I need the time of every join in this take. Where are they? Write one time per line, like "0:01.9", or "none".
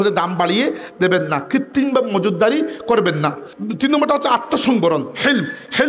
0:03.5